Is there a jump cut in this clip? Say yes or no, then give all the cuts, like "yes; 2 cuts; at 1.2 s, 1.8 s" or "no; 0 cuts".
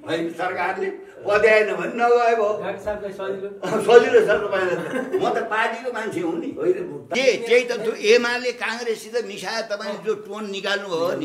yes; 1 cut; at 7.1 s